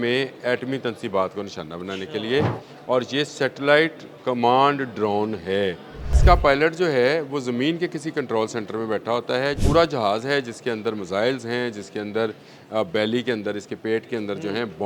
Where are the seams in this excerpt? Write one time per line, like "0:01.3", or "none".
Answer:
0:06.1
0:09.6